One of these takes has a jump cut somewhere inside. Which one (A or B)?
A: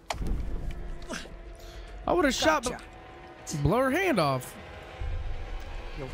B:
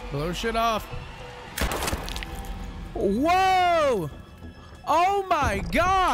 B